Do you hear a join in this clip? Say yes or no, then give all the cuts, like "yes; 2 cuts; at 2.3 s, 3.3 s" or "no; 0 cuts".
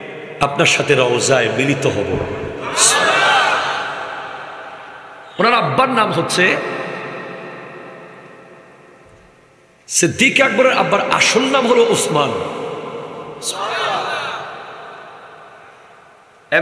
no; 0 cuts